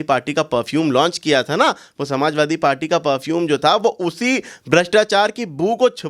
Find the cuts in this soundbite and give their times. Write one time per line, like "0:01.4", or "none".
none